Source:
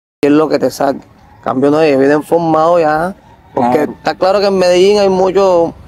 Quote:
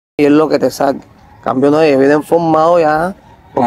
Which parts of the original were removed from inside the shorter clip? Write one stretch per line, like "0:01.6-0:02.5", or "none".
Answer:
none